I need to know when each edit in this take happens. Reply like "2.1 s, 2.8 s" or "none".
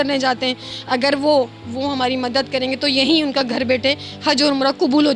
none